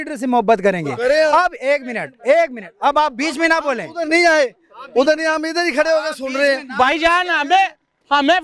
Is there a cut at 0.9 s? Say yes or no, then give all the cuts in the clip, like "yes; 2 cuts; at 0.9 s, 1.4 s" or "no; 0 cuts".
no; 0 cuts